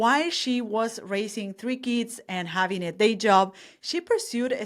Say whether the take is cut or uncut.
uncut